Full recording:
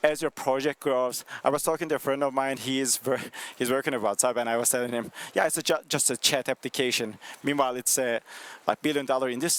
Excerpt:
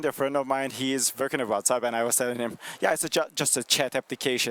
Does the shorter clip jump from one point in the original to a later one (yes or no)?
yes